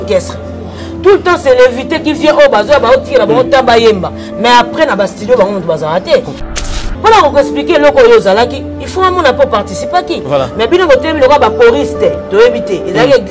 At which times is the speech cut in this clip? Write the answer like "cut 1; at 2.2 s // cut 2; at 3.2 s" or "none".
cut 1; at 6.7 s